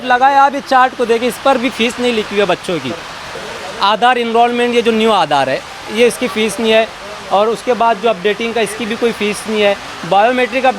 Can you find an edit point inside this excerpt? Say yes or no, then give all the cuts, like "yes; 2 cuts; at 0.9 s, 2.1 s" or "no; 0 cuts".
yes; 1 cut; at 3.2 s